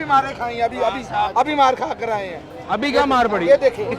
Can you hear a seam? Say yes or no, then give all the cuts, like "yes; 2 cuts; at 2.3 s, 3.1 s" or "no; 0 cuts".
no; 0 cuts